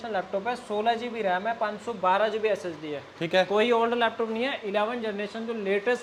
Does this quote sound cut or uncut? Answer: uncut